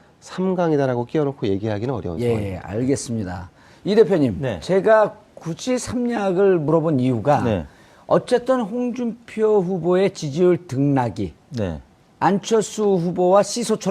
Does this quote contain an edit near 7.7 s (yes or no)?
no